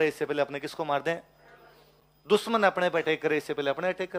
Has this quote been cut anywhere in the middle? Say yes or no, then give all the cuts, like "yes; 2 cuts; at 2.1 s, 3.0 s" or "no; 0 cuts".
no; 0 cuts